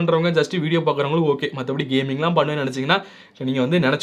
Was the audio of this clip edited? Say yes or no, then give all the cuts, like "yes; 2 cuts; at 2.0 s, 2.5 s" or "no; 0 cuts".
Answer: no; 0 cuts